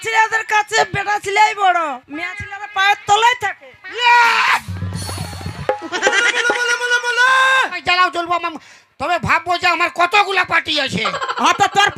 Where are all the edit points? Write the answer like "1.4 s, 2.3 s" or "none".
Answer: 7.8 s

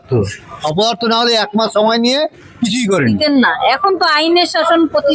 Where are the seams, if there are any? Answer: 3.0 s

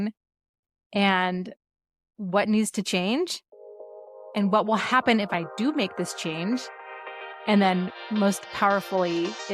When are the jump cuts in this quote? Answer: none

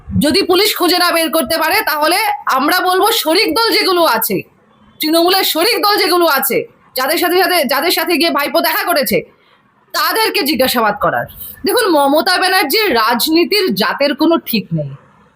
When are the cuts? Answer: 11.3 s

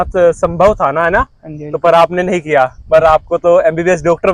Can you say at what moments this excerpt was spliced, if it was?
none

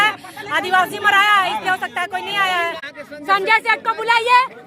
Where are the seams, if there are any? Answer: 3.0 s

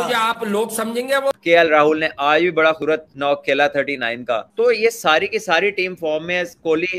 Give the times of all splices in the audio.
1.3 s, 2.9 s

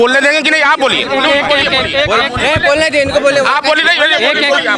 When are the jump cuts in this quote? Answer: none

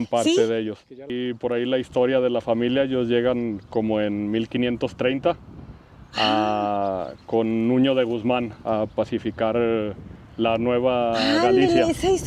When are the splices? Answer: 1.2 s

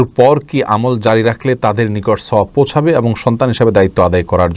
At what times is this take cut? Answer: none

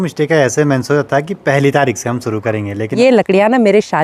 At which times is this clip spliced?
2.8 s

